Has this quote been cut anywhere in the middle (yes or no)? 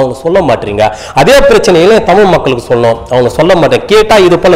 no